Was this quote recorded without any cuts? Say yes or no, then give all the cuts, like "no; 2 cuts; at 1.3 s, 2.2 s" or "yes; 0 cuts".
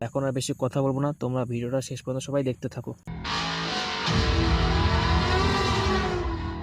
no; 1 cut; at 3.1 s